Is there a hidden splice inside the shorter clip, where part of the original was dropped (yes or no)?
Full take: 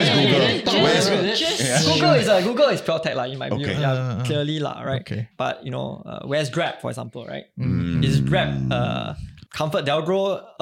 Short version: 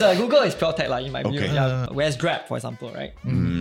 yes